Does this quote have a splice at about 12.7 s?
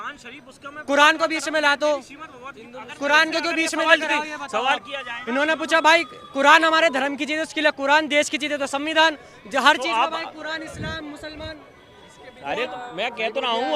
yes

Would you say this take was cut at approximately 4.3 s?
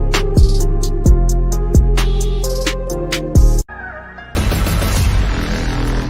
yes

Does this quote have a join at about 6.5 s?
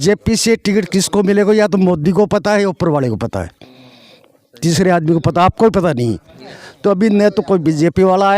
yes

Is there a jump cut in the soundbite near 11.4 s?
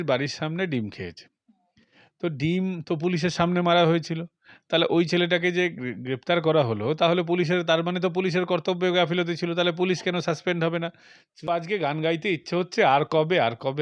yes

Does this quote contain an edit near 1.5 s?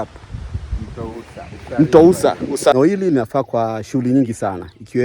no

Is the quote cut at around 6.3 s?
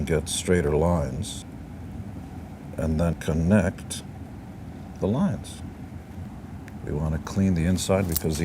yes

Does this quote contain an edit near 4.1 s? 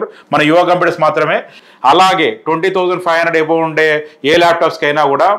no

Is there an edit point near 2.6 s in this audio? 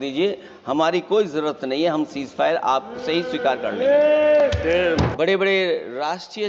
no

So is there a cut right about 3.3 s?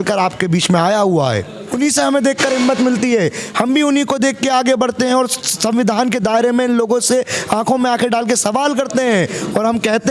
no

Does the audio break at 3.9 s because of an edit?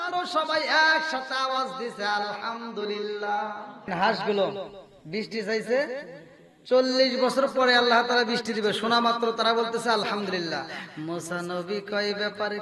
yes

